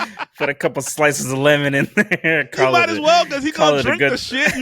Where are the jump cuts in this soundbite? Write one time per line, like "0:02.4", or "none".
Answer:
none